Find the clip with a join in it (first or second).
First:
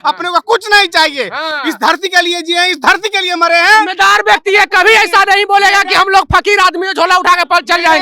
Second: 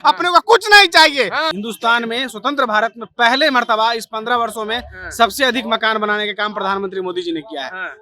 second